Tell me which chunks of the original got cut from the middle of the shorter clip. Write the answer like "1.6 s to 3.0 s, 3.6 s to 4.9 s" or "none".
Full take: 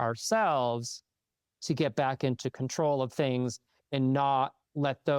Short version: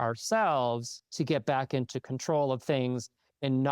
1.0 s to 1.5 s